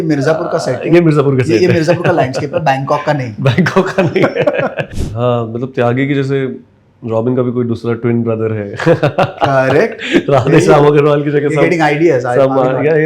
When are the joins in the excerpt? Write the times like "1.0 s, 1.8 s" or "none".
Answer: 4.9 s